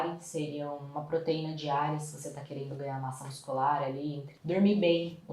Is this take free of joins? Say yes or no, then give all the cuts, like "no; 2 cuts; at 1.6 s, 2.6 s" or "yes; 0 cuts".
no; 1 cut; at 4.3 s